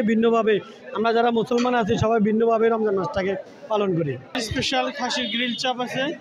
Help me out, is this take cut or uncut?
cut